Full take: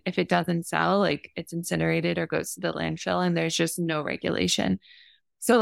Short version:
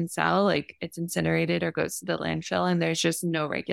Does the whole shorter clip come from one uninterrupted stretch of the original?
yes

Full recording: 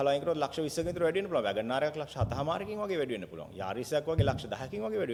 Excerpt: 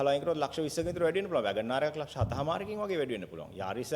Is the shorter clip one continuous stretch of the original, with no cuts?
yes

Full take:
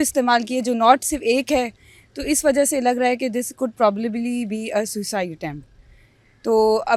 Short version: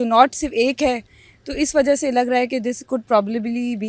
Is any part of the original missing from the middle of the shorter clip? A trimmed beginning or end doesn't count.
no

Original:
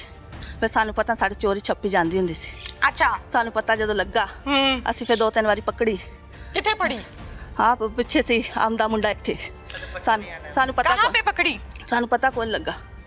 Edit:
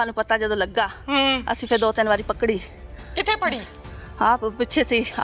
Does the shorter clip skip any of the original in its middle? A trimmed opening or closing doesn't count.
no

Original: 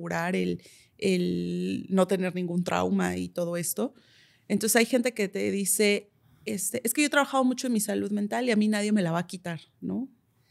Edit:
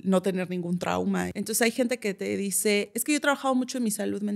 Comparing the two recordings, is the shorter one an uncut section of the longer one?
no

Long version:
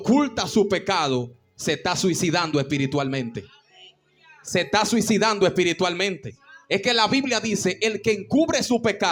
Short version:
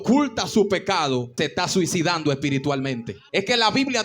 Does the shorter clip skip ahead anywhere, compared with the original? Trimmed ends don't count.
yes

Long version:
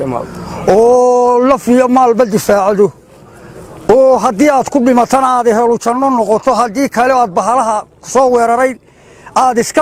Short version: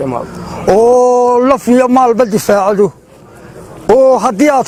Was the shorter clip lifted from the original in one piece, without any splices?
yes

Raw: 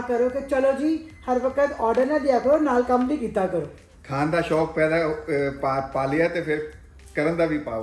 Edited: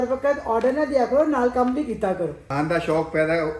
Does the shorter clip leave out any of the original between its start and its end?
yes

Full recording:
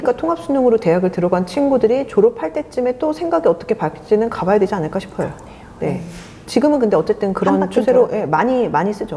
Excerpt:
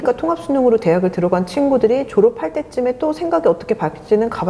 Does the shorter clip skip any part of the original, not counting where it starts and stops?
no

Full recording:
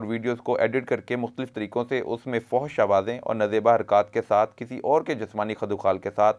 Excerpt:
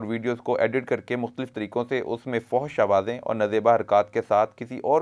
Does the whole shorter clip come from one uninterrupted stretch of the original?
yes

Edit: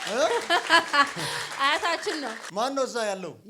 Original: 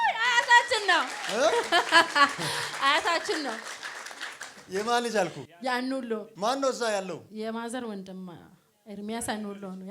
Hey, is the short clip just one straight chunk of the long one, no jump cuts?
no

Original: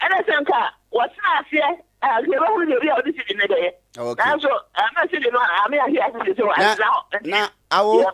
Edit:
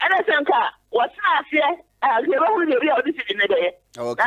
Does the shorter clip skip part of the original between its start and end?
no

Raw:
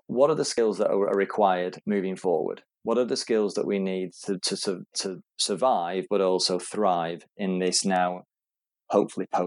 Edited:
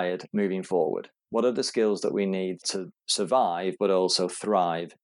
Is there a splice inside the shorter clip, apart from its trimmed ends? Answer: yes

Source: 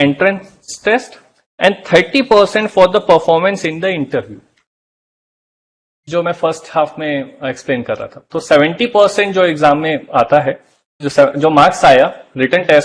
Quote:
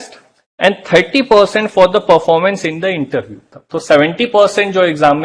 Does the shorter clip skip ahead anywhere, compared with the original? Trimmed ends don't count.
yes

